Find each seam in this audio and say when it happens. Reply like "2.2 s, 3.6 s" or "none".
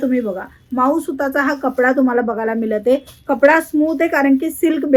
none